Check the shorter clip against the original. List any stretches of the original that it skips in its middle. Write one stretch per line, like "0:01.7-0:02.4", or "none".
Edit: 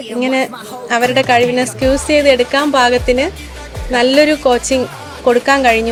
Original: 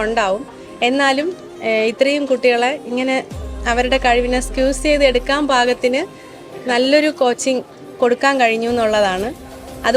none